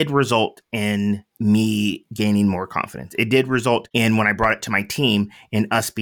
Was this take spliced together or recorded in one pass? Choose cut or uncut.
cut